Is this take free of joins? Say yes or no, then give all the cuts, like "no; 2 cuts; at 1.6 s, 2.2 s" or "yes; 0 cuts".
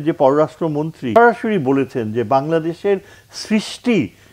no; 1 cut; at 1.0 s